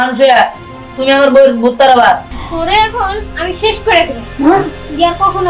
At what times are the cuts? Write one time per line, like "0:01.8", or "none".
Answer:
0:02.3